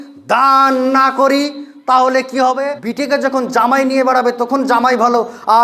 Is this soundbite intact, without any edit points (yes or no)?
no